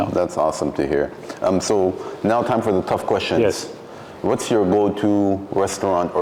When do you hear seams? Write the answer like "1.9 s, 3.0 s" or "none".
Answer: none